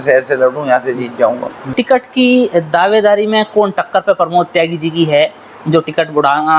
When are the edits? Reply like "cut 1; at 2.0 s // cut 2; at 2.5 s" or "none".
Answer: cut 1; at 1.7 s

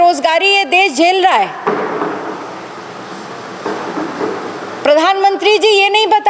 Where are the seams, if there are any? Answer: none

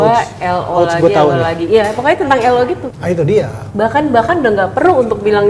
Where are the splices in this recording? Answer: cut 1; at 2.9 s

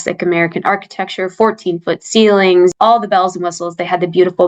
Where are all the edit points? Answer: cut 1; at 2.7 s

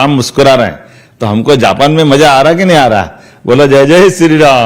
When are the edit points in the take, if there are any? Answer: none

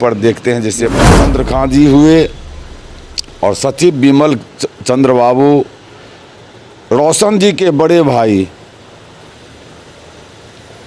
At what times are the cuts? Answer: cut 1; at 1.2 s

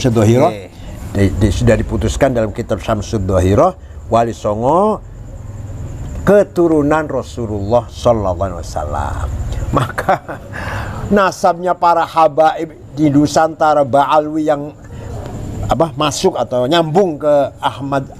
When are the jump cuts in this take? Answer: cut 1; at 9.6 s

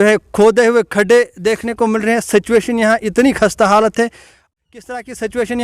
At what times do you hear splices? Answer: cut 1; at 4.5 s

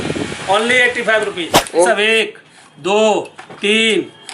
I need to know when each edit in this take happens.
cut 1; at 1.9 s

